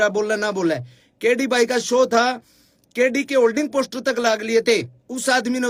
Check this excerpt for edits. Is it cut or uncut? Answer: uncut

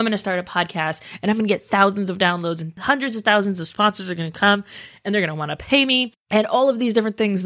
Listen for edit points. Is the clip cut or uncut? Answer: cut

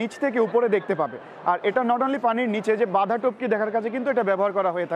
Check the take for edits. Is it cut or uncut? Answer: uncut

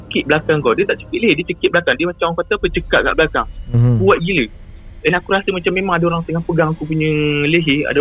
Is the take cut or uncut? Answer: uncut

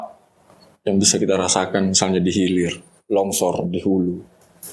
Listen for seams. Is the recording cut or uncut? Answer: uncut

